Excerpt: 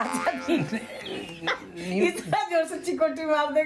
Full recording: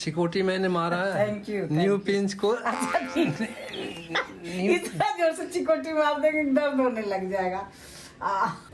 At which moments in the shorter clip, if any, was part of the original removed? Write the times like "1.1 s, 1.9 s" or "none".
none